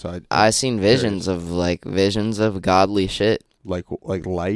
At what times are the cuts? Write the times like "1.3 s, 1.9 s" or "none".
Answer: 3.5 s